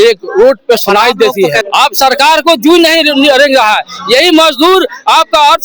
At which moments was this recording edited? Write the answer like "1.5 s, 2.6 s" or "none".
1.6 s